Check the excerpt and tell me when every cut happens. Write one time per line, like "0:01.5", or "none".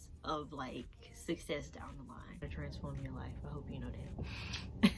0:02.5

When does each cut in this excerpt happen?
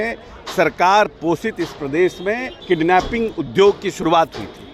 0:02.5

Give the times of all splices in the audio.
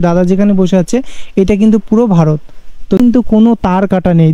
0:03.0

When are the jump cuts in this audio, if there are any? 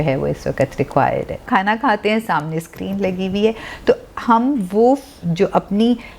0:01.4

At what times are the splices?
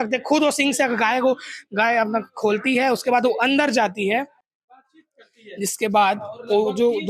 none

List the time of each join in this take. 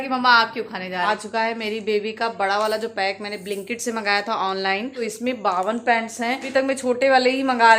0:01.1
0:05.0
0:06.4

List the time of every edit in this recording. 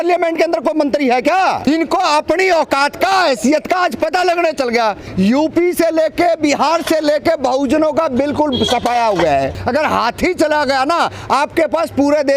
0:01.6
0:05.0
0:09.6

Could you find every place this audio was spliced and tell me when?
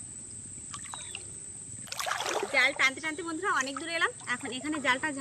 0:01.9

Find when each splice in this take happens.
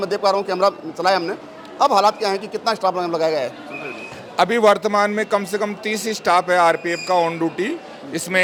none

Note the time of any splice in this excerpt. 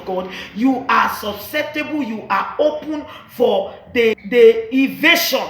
0:04.1

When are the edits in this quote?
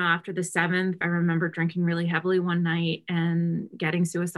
0:01.0

